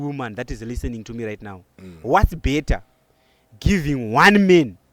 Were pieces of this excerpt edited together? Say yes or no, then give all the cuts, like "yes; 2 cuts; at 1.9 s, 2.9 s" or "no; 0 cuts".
no; 0 cuts